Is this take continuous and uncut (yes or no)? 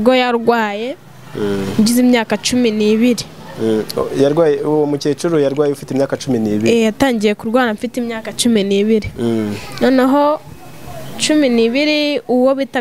yes